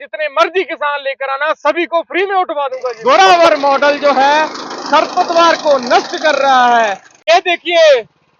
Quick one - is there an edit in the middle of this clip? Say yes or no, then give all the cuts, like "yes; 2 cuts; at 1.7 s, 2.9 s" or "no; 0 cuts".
yes; 2 cuts; at 2.9 s, 7.1 s